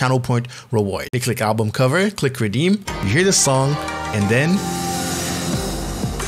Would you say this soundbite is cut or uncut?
cut